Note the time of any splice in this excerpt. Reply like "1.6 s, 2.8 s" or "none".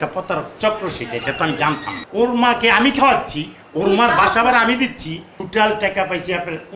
1.9 s, 5.3 s